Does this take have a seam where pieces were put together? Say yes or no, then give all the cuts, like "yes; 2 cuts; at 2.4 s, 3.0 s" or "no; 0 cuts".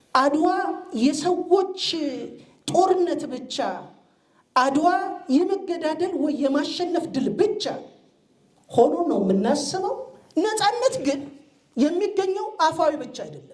yes; 1 cut; at 10.1 s